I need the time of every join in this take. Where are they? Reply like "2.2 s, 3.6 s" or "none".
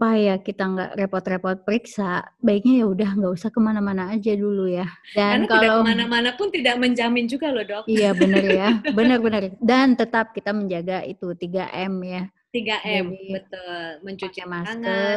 5.0 s, 9.5 s

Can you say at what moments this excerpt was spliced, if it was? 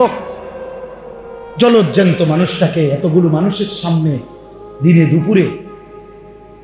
none

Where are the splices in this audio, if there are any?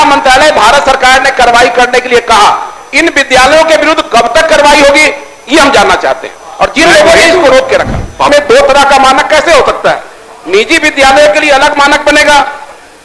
8.3 s

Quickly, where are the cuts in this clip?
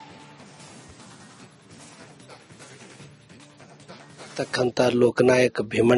1.4 s

